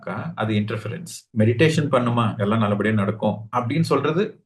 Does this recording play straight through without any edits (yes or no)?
yes